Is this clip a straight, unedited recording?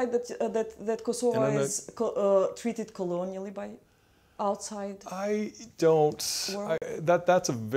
yes; 0 cuts

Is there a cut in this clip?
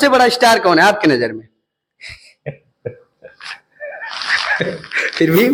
no; 0 cuts

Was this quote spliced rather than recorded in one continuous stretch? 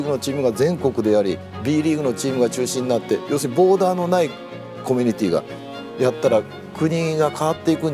no; 0 cuts

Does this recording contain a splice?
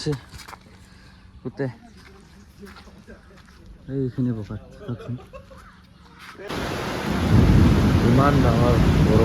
yes; 1 cut; at 6.5 s

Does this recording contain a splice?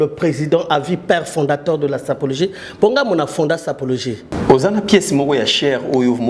yes; 1 cut; at 4.3 s

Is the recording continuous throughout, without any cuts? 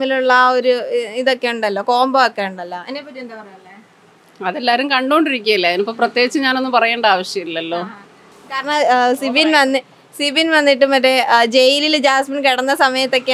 yes; 0 cuts

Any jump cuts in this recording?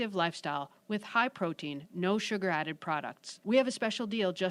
no; 0 cuts

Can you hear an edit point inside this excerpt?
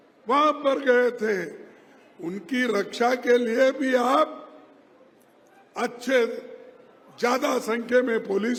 no; 0 cuts

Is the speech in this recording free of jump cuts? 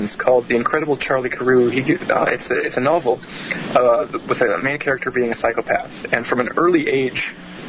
no; 1 cut; at 5.3 s

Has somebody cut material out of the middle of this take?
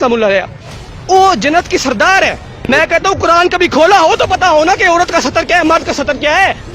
yes; 1 cut; at 2.5 s

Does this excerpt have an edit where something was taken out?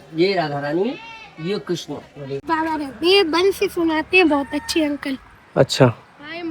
yes; 1 cut; at 2.4 s

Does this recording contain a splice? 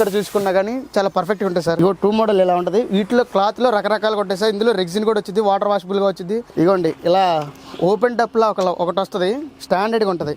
yes; 2 cuts; at 1.8 s, 6.5 s

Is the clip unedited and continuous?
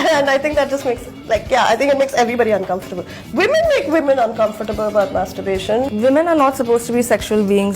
no; 1 cut; at 5.9 s

